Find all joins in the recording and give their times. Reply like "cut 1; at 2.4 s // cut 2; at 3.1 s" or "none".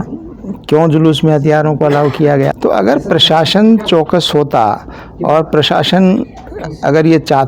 cut 1; at 2.5 s